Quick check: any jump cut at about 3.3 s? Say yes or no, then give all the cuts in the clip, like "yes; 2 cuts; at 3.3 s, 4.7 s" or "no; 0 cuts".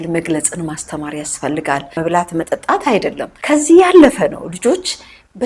yes; 2 cuts; at 1.9 s, 3.3 s